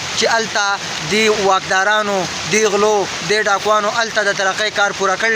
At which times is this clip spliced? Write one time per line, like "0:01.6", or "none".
none